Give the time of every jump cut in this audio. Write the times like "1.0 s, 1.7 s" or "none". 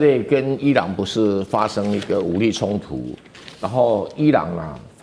none